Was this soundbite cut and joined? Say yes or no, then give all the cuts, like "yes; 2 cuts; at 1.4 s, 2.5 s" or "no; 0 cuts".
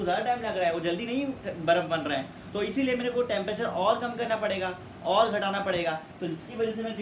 no; 0 cuts